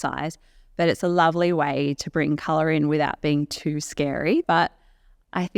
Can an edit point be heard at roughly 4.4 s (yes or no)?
yes